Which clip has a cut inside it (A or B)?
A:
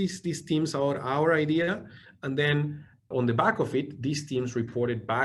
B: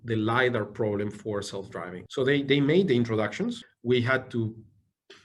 B